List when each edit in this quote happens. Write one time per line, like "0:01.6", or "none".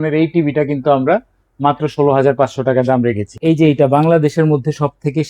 0:03.4